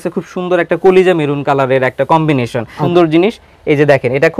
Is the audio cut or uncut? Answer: cut